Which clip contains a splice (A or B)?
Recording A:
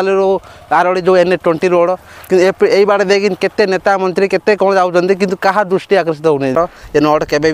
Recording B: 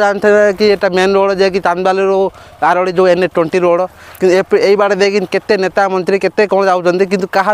A